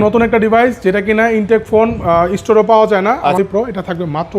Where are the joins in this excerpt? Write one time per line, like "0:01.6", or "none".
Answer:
0:03.4